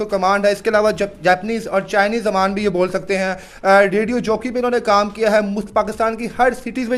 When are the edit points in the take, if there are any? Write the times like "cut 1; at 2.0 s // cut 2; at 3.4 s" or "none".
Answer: none